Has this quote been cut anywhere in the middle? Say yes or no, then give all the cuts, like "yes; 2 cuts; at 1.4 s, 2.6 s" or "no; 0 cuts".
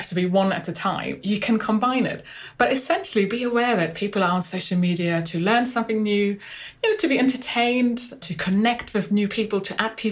yes; 1 cut; at 8.2 s